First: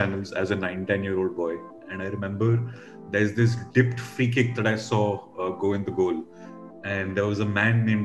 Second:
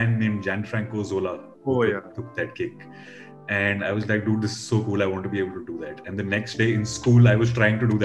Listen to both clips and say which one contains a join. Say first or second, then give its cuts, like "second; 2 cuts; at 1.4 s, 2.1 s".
first; 1 cut; at 1.8 s